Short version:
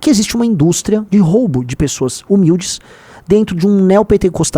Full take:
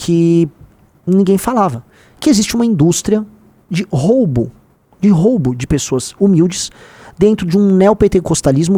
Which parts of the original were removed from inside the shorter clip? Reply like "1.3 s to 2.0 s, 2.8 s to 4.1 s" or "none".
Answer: 3.2 s to 5.0 s